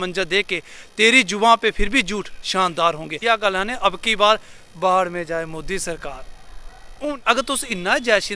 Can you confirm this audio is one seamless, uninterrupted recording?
no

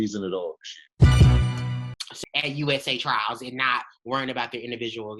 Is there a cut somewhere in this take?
yes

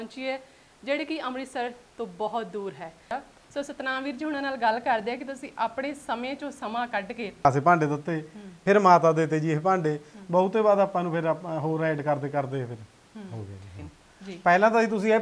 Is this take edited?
yes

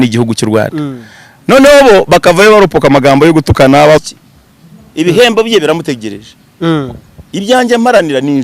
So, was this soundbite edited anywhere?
yes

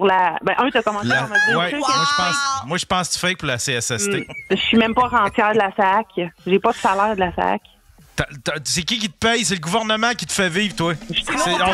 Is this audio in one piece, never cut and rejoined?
no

